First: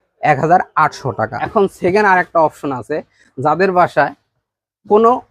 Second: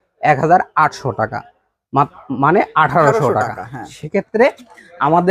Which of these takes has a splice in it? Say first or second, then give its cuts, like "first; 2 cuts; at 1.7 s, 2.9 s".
first; 1 cut; at 1.4 s